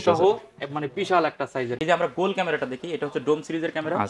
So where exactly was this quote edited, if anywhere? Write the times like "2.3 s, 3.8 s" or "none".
1.8 s